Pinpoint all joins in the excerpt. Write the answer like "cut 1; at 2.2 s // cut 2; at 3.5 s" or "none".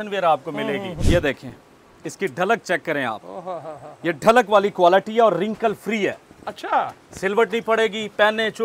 cut 1; at 0.9 s